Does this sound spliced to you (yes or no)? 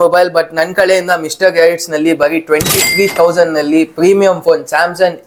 no